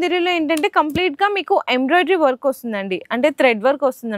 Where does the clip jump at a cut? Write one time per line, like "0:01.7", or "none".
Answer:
none

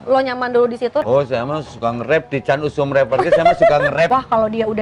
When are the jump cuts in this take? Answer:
0:01.0
0:04.1

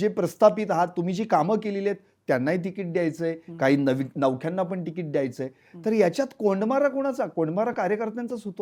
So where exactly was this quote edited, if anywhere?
none

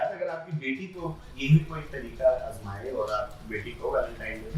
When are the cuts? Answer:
none

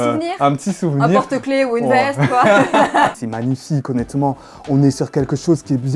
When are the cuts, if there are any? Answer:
0:03.2

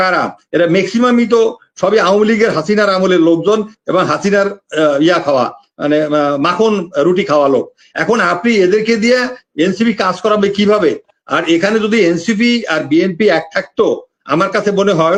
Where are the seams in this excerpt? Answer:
none

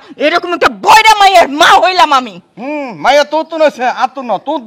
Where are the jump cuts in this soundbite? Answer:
none

